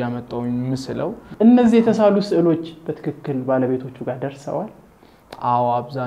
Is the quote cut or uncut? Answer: cut